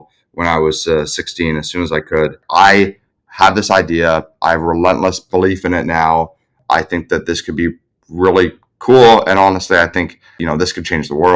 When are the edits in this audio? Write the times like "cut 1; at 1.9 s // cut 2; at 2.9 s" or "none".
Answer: cut 1; at 2.4 s // cut 2; at 6.6 s // cut 3; at 10.4 s

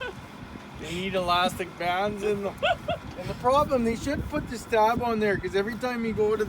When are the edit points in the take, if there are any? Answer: cut 1; at 3.1 s

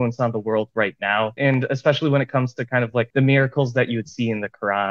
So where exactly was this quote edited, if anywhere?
cut 1; at 1.4 s // cut 2; at 3.1 s

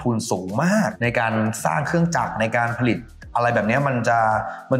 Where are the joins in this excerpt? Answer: none

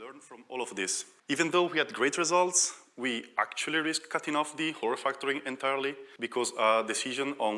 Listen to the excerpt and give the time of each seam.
cut 1; at 1.1 s // cut 2; at 6.1 s

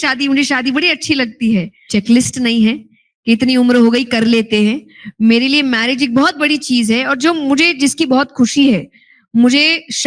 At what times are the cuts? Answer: cut 1; at 1.8 s

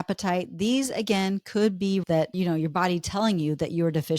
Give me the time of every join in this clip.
cut 1; at 2.1 s

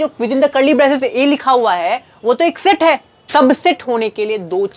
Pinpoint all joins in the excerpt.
cut 1; at 3.1 s

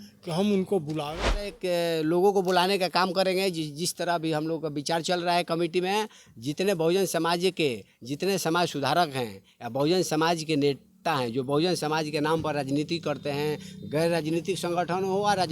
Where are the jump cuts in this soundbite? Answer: cut 1; at 1.6 s

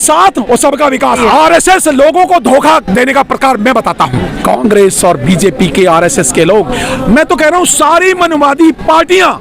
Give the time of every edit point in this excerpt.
cut 1; at 1.2 s // cut 2; at 4.3 s

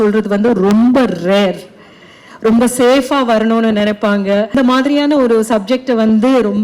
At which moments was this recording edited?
cut 1; at 4.5 s

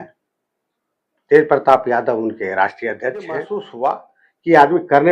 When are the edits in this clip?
cut 1; at 3.6 s

